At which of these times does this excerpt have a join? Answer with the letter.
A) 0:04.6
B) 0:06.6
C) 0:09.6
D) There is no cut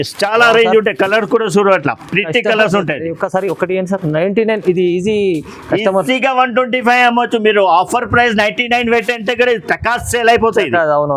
D